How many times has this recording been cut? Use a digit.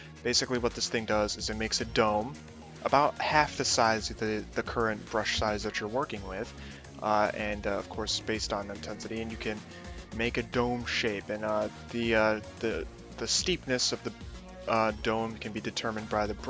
1